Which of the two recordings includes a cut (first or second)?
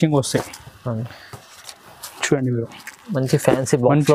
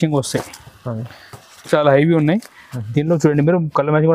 second